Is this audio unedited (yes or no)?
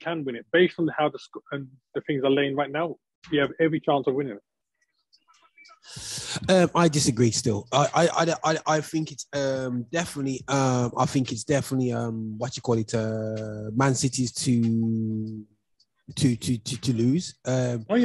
yes